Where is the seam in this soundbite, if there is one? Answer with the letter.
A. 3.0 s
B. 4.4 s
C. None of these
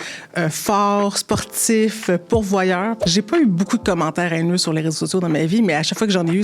A